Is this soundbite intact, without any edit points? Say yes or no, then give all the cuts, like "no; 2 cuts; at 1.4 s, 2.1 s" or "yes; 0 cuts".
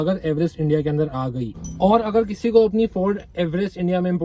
no; 1 cut; at 1.4 s